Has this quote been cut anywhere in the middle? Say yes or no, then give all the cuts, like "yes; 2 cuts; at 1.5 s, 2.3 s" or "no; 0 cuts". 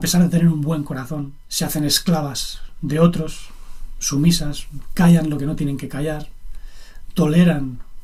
no; 0 cuts